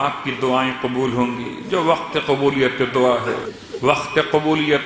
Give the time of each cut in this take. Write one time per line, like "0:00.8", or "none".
0:03.6